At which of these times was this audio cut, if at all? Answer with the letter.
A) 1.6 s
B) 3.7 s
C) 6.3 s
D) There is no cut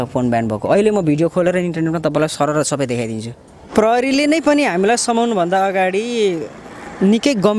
B